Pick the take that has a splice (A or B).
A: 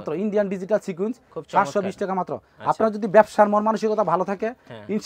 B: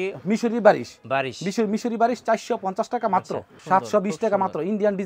B